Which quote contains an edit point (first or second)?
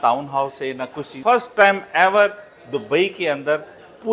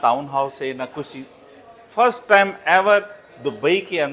first